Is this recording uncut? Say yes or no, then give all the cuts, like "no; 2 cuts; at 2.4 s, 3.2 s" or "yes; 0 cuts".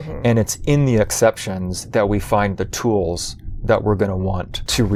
yes; 0 cuts